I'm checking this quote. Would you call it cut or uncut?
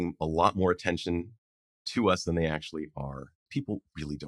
cut